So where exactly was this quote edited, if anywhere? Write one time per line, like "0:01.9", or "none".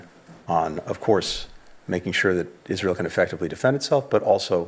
none